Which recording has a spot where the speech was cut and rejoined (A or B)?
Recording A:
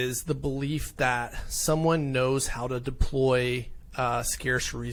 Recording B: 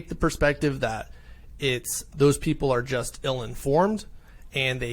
B